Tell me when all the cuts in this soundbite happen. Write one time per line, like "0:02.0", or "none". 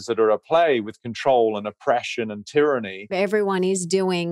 0:03.1